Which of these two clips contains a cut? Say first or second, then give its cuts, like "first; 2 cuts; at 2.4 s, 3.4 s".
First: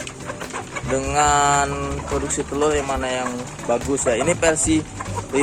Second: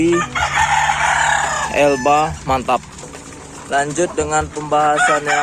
second; 1 cut; at 3.0 s